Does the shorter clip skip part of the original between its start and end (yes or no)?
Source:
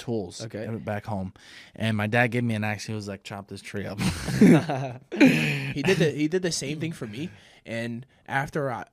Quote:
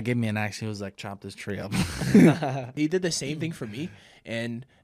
yes